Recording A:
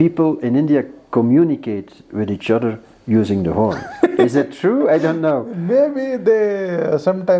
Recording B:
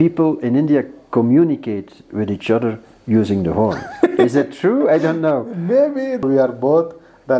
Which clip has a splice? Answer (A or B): B